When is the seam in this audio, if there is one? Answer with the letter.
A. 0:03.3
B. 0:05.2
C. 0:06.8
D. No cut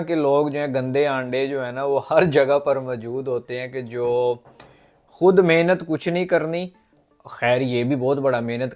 D